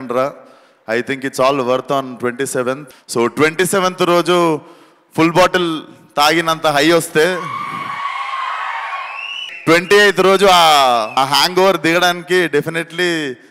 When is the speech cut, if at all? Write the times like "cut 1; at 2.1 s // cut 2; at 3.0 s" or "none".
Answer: cut 1; at 2.8 s // cut 2; at 9.4 s // cut 3; at 11.1 s